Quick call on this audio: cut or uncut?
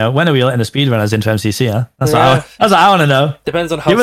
uncut